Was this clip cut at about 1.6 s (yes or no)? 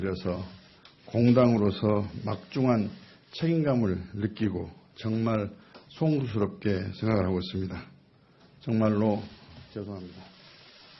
yes